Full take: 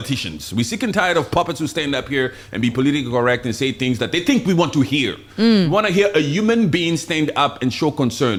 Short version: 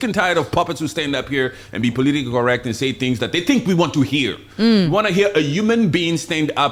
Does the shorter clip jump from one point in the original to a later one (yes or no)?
no